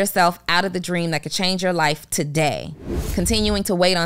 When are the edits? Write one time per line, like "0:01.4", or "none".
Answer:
0:03.0